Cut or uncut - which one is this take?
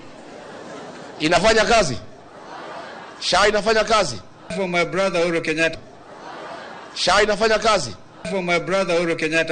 cut